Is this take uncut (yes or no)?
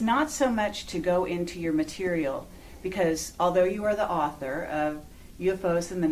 no